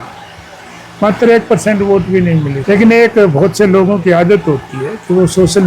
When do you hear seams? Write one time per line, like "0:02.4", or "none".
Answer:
0:02.5